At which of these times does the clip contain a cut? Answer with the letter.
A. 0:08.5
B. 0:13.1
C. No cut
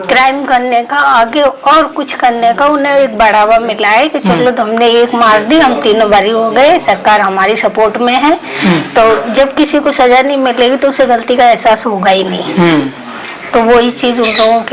C